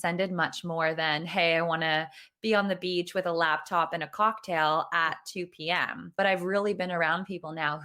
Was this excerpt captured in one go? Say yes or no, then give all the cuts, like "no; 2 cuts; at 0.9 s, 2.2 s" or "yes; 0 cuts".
no; 1 cut; at 6.0 s